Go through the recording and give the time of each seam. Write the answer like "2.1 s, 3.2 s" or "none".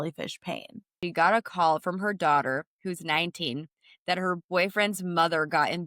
1.0 s